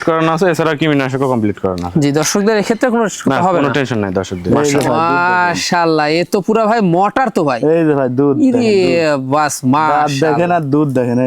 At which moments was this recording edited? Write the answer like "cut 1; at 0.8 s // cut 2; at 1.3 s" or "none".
cut 1; at 4.5 s